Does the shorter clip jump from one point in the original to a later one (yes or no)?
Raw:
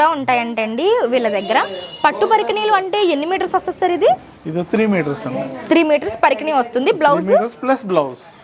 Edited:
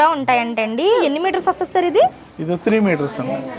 yes